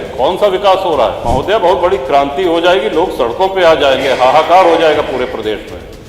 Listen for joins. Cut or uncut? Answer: cut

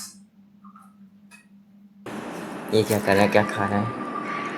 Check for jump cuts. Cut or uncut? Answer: cut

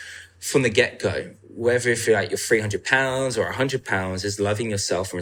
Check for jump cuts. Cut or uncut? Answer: uncut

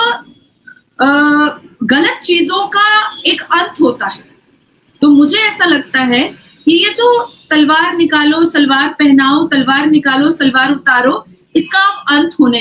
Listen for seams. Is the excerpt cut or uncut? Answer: uncut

